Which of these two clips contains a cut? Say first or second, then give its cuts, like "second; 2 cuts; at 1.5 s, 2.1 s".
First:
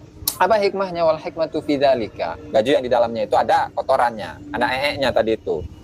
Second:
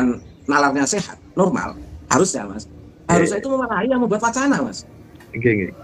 first; 1 cut; at 2.4 s